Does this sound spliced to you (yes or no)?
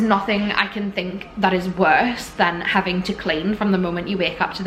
no